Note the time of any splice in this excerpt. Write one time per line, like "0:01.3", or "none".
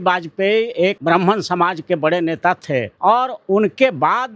0:01.0
0:02.9

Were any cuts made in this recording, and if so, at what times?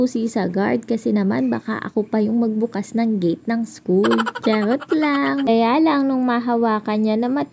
0:05.5

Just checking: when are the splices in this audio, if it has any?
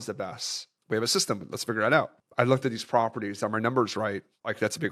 none

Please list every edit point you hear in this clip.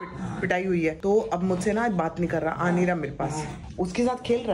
none

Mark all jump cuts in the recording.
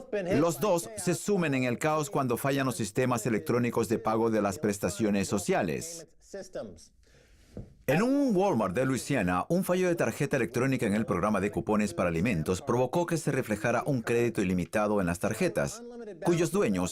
none

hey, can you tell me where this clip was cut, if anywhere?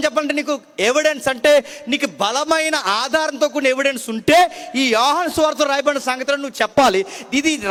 none

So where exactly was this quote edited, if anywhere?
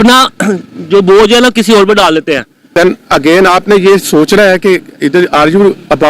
0:02.7

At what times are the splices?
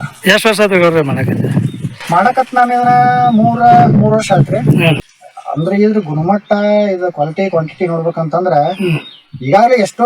0:05.0

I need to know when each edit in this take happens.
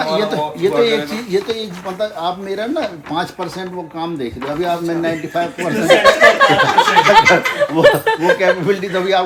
none

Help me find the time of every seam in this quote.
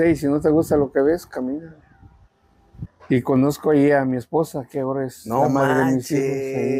0:03.0

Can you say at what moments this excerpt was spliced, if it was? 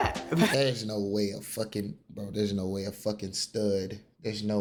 none

